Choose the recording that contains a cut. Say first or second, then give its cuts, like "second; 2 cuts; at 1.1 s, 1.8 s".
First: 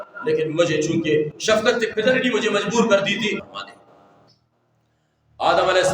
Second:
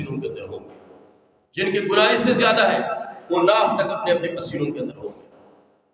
first; 1 cut; at 3.5 s